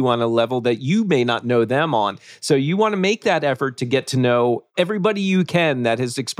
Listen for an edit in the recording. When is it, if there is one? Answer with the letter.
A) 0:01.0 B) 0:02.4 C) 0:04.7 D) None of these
C